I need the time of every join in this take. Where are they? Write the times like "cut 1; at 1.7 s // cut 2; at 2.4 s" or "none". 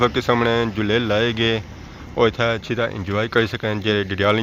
none